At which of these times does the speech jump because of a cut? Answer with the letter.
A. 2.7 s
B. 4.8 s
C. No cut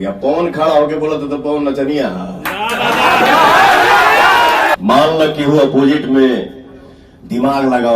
B